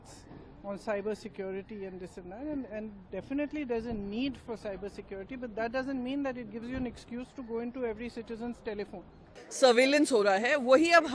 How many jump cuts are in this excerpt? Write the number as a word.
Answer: one